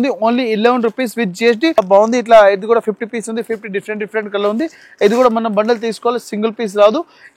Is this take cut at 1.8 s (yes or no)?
yes